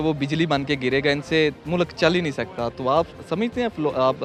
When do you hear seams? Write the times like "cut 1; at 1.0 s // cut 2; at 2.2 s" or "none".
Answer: none